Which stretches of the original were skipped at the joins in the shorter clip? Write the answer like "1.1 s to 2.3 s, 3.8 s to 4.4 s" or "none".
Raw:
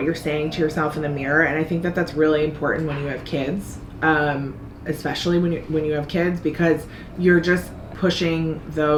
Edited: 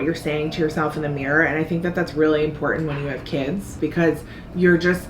3.8 s to 6.4 s